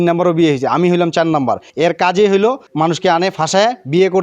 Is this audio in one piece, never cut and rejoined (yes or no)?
no